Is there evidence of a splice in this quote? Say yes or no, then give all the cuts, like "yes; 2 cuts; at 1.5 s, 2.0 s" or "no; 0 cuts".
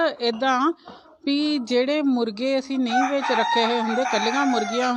no; 0 cuts